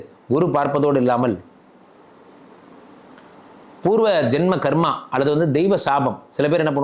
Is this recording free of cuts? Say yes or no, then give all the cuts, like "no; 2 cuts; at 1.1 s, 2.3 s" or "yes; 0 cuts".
yes; 0 cuts